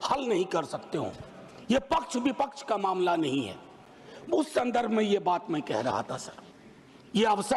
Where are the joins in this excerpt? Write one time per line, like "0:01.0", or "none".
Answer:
none